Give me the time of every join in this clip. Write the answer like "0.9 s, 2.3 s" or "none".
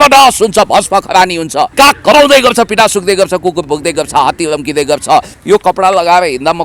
1.7 s, 5.3 s

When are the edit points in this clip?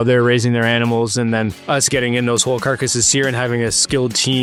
none

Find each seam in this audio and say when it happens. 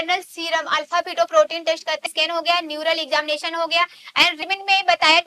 2.1 s, 4.4 s

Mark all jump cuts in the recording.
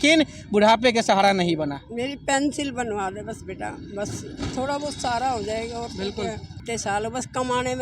6.6 s

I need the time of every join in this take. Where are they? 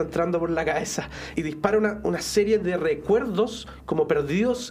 1.3 s

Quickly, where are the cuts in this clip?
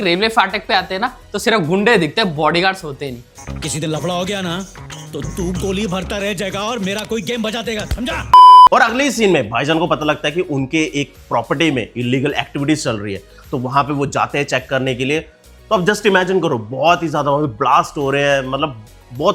none

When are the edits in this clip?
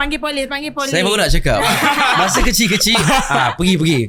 none

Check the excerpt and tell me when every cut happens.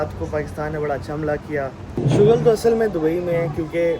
1.8 s

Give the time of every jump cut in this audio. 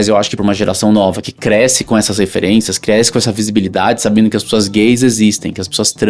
none

